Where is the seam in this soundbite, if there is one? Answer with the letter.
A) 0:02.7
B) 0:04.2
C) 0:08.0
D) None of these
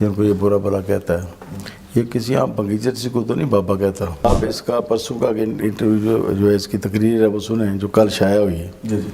B